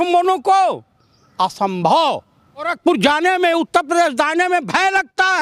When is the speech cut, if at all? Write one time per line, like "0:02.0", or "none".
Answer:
0:02.7